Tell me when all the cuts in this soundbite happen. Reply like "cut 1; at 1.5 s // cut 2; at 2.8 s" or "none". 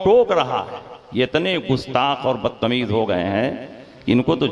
none